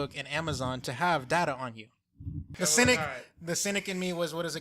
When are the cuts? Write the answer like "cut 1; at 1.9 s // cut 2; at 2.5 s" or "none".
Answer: cut 1; at 2.6 s